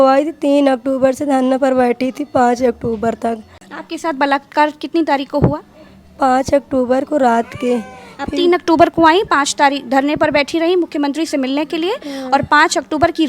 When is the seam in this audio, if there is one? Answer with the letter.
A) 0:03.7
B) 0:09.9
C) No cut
A